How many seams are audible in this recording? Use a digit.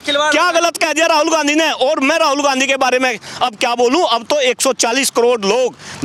0